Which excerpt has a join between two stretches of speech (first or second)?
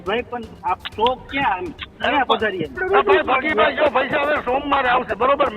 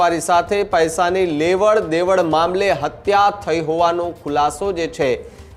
first